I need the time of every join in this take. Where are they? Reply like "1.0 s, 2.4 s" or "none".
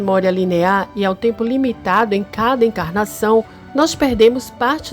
3.6 s